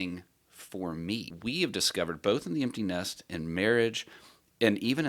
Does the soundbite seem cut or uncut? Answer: cut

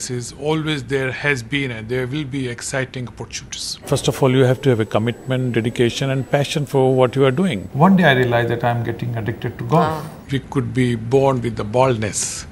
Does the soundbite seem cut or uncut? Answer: cut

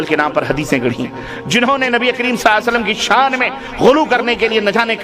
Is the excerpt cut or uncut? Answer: uncut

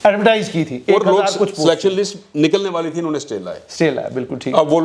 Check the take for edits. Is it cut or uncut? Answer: uncut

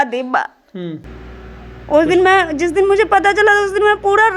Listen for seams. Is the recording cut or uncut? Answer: cut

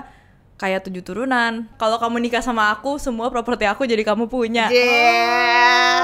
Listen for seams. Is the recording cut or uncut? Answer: cut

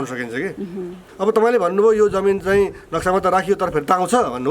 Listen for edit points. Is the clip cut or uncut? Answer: cut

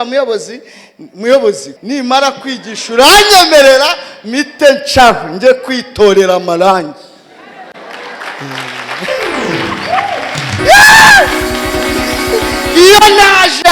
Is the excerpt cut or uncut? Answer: cut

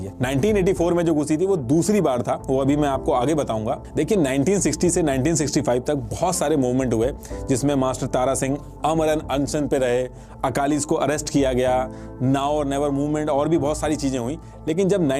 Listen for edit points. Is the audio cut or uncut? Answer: uncut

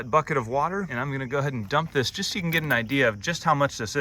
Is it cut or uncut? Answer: cut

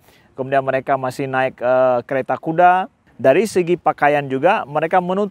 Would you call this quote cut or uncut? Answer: cut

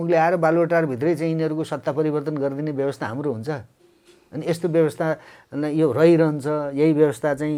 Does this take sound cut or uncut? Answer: uncut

